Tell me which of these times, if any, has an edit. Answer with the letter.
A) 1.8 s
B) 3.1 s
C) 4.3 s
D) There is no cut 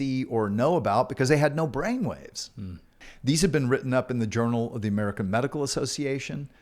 B